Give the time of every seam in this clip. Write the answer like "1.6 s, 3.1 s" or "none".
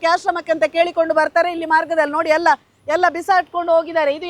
none